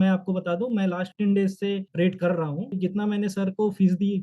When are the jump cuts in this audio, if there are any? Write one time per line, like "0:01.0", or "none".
0:01.1